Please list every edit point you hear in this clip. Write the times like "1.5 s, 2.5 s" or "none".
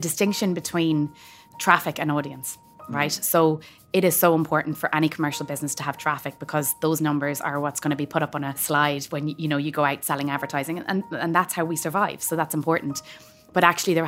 8.6 s